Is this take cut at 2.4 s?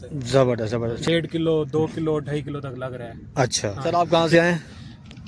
no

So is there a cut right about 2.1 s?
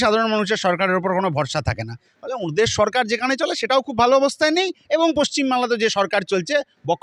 yes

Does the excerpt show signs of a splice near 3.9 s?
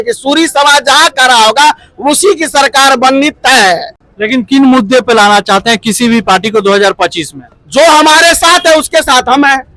no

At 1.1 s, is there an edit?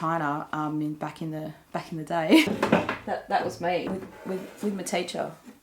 no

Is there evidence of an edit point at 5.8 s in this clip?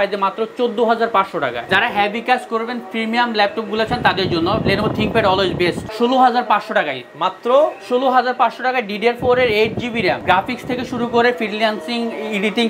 yes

